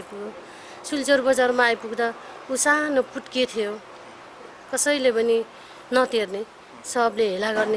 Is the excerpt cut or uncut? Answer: uncut